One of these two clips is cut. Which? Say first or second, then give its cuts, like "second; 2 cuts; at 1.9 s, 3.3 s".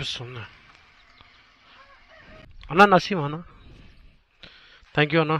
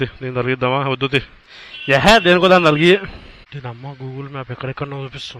second; 1 cut; at 3.3 s